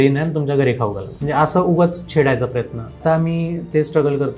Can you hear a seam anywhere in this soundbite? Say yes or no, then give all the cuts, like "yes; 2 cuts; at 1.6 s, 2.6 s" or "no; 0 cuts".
yes; 2 cuts; at 1.2 s, 3.0 s